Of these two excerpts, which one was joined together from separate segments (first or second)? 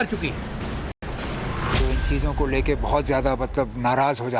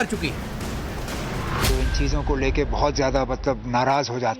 second